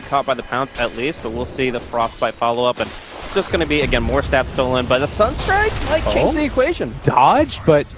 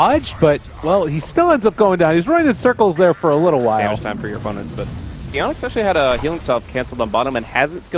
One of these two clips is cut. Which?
first; 1 cut; at 2.3 s

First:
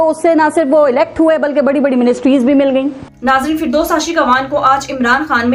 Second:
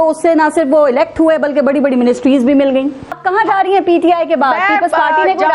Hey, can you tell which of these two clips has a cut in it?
second; 1 cut; at 3.1 s

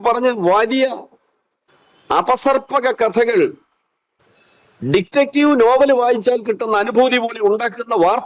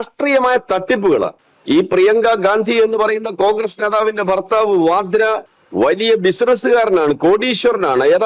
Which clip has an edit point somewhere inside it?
second; 2 cuts; at 1.5 s, 5.6 s

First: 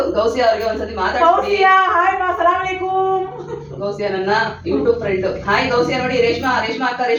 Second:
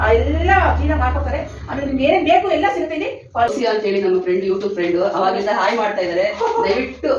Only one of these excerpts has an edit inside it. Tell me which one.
second; 1 cut; at 3.5 s

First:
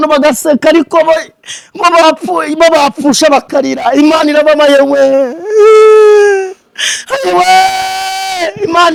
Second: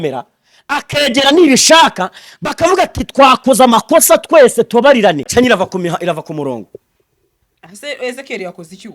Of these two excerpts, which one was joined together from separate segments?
second; 1 cut; at 5.3 s

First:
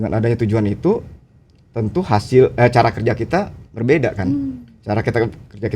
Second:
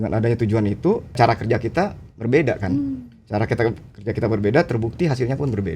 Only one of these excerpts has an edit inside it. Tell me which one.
second; 1 cut; at 1.2 s

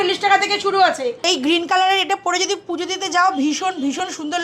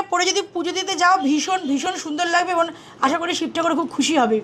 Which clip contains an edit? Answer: first; 1 cut; at 1.2 s

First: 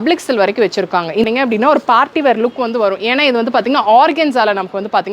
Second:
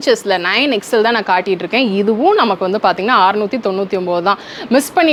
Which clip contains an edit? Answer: first; 1 cut; at 1.2 s

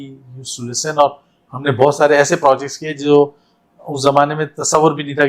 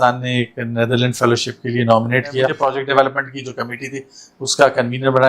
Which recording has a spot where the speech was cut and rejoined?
second; 1 cut; at 2.5 s

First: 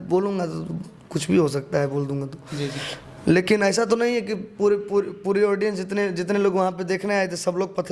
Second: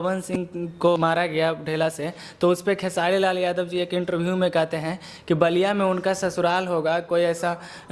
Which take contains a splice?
second; 1 cut; at 1.0 s

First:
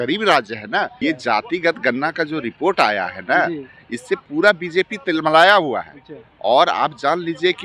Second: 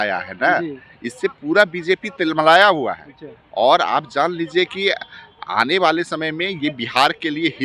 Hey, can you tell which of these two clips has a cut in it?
first; 1 cut; at 1.0 s

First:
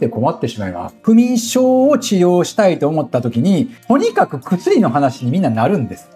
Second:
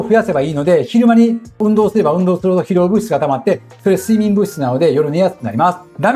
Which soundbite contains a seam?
first; 1 cut; at 0.9 s

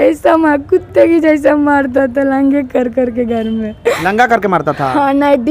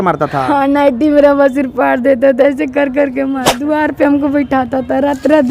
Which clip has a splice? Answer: second; 1 cut; at 3.6 s

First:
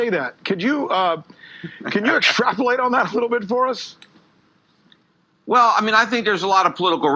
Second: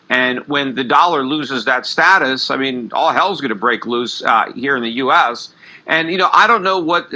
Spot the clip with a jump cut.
second; 1 cut; at 4.1 s

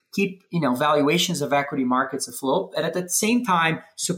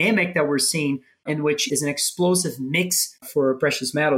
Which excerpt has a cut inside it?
second; 2 cuts; at 1.6 s, 3.3 s

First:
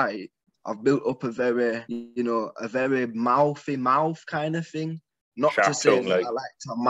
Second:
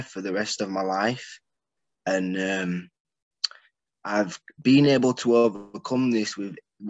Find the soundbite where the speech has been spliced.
first; 1 cut; at 1.9 s

